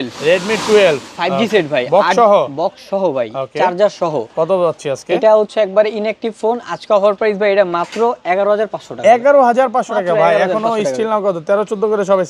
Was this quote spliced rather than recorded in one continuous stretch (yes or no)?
no